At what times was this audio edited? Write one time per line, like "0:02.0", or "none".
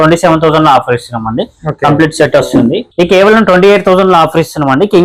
0:02.8